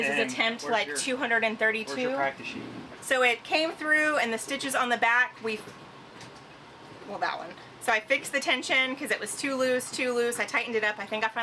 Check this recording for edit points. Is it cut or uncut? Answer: uncut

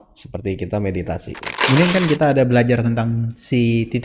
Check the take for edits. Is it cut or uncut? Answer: cut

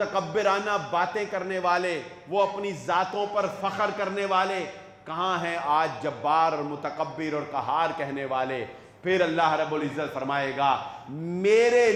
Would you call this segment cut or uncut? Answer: uncut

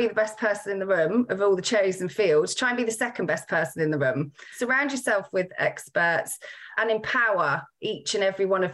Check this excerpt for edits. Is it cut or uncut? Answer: cut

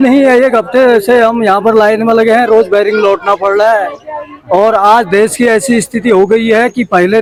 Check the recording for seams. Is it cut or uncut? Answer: uncut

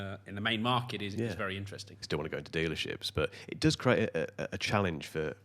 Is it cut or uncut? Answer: cut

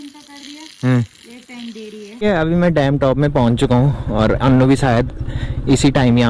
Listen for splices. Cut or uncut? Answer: cut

